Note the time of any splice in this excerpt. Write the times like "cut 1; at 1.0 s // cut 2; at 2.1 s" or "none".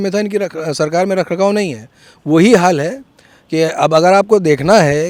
none